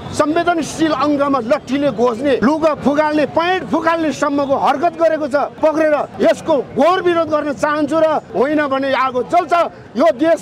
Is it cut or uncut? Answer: cut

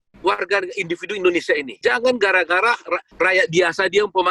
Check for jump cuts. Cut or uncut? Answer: cut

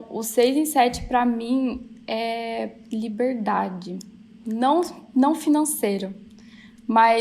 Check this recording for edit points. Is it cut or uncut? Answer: uncut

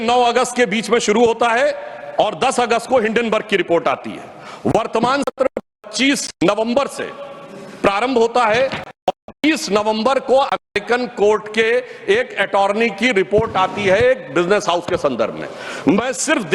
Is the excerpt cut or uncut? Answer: uncut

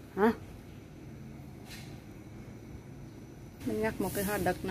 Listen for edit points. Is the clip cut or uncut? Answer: cut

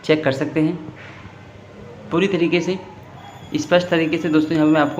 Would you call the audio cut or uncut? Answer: uncut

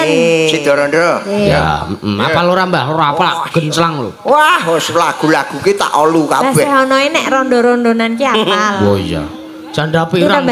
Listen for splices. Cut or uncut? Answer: uncut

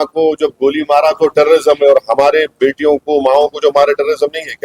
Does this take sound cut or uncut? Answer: uncut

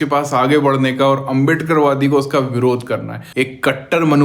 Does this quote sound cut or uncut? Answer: cut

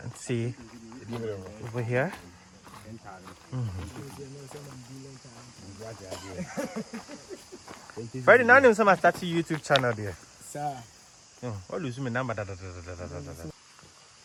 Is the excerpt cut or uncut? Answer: uncut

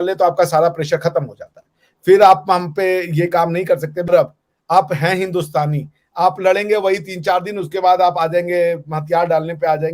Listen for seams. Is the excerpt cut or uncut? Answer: cut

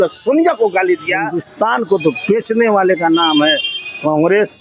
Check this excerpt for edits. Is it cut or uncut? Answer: cut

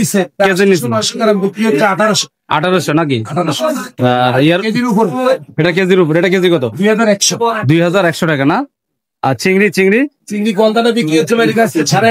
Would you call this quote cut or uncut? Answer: uncut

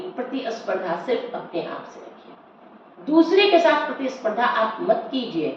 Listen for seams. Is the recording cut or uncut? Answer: uncut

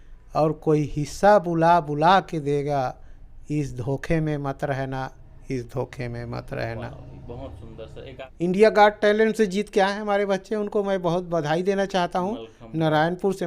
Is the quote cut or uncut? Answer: cut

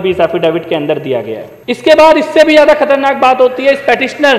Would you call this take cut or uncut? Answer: cut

